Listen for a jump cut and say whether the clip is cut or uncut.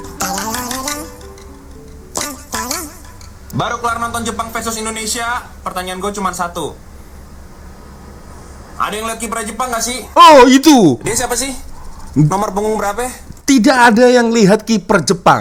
uncut